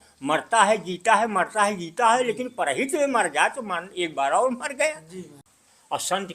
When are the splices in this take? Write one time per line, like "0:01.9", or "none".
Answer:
0:05.4